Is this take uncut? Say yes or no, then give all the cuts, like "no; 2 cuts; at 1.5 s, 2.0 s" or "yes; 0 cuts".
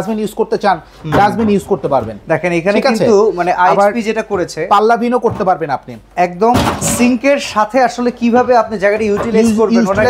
yes; 0 cuts